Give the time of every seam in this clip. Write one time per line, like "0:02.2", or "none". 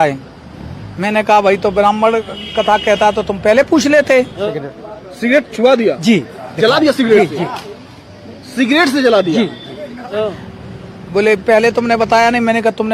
0:04.4
0:10.1